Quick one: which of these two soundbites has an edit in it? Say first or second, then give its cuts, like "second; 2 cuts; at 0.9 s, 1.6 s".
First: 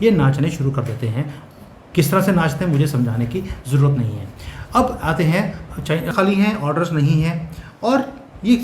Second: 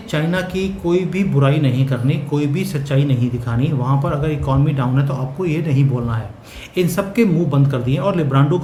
first; 1 cut; at 6.1 s